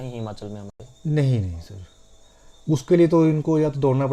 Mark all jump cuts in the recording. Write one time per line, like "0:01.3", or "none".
none